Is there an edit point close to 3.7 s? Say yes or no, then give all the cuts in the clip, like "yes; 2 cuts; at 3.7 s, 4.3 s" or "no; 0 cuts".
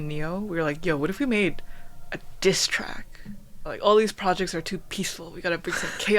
yes; 1 cut; at 3.7 s